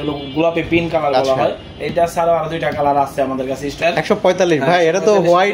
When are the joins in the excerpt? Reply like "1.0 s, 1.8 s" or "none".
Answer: 3.7 s